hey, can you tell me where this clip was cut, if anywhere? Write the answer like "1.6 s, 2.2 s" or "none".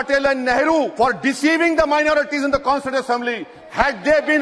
0.9 s